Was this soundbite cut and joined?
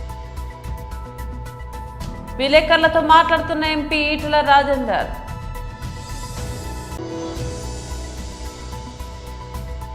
no; 0 cuts

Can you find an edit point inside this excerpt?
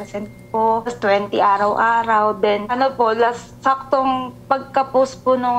no; 0 cuts

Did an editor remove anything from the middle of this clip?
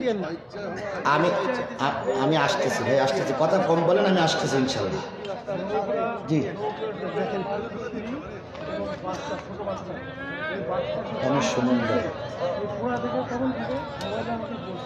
no; 0 cuts

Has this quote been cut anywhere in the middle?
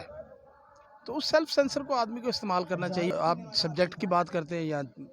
yes; 1 cut; at 3.1 s

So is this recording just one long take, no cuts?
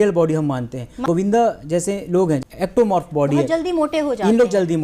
no; 2 cuts; at 1.0 s, 2.4 s

